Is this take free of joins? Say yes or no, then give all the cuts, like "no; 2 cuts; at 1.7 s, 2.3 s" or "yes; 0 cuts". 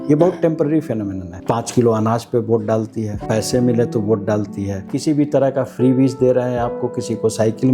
no; 3 cuts; at 1.3 s, 3.1 s, 4.9 s